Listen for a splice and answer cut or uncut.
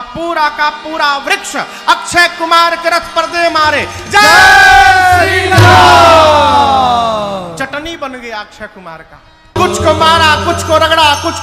cut